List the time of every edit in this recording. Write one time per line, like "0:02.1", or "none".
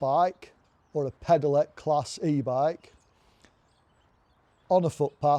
none